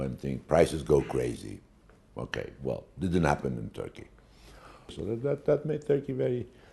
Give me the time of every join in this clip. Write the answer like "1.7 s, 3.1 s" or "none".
3.0 s